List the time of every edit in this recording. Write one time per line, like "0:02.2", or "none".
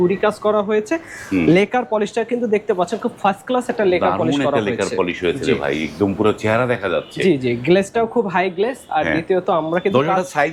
none